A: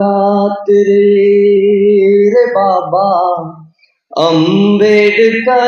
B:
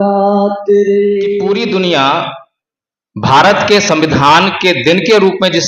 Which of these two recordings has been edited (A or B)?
B